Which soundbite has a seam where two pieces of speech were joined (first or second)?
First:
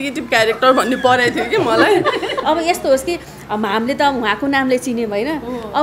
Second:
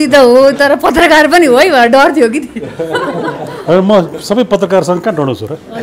first